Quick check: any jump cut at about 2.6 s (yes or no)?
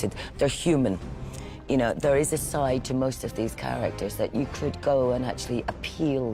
no